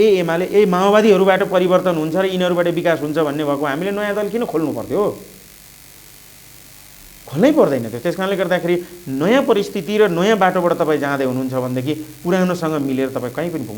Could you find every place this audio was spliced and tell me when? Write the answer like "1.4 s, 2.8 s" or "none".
none